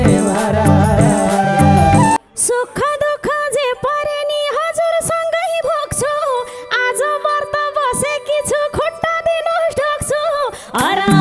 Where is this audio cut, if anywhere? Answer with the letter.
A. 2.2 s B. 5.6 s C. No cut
A